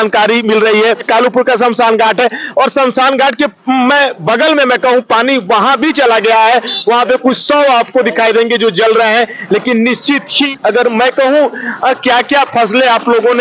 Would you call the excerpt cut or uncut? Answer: cut